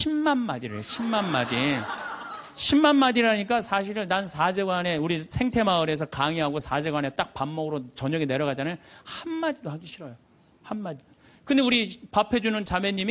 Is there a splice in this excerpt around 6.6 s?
yes; 1 cut; at 6.6 s

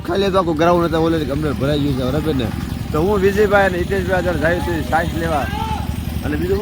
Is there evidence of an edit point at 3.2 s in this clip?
no; 0 cuts

